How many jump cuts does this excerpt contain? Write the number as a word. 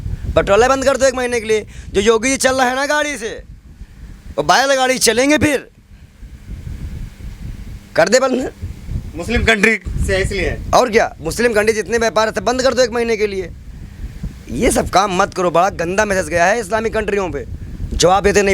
zero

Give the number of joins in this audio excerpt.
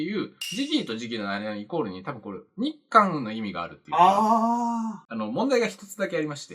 one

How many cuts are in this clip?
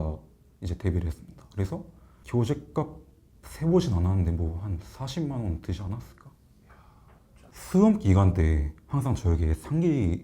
one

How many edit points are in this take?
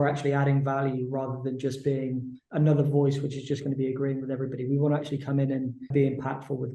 two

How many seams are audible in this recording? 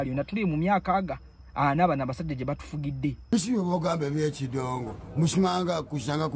one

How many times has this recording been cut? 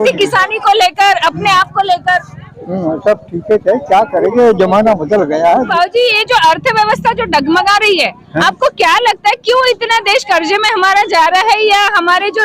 one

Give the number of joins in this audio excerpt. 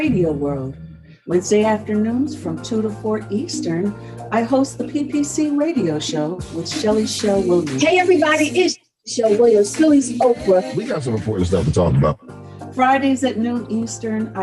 one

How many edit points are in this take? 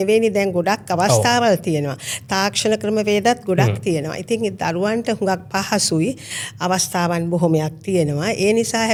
zero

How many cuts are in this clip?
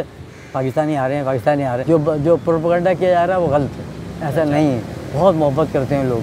one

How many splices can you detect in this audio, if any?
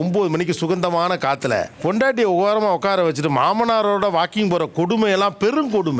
zero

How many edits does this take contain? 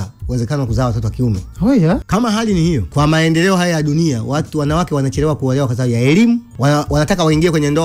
three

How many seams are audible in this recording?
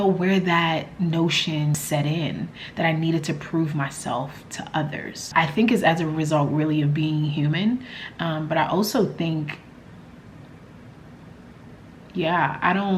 one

